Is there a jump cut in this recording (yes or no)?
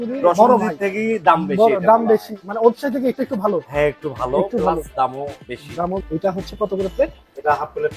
yes